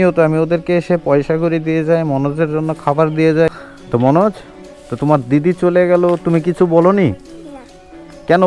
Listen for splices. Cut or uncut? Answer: cut